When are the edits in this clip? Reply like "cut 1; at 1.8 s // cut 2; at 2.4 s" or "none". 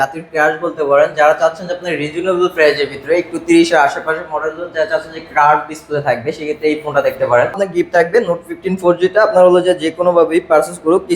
cut 1; at 7.6 s